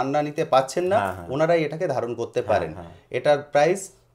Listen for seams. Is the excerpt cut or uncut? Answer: uncut